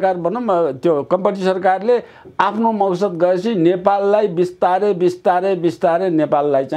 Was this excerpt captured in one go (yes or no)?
yes